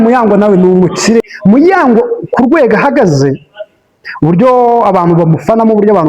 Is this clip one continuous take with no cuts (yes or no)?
no